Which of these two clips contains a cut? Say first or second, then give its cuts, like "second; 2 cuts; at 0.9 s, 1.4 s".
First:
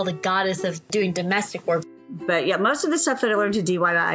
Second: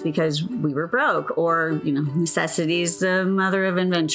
first; 2 cuts; at 0.9 s, 1.9 s